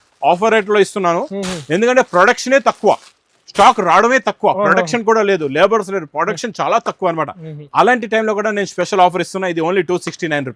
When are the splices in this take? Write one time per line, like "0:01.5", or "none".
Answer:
none